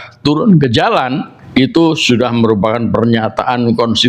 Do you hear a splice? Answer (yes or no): yes